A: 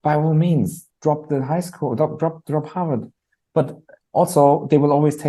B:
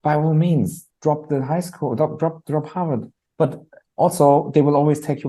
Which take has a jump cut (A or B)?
B